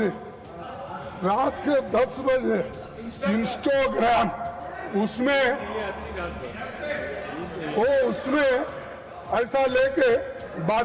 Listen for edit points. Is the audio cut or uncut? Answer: uncut